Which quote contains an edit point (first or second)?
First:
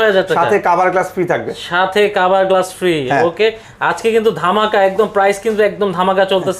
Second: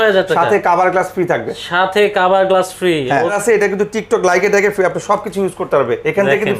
second